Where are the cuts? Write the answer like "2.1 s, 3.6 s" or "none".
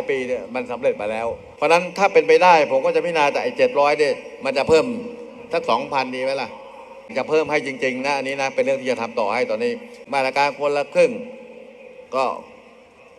1.4 s, 7.1 s, 9.9 s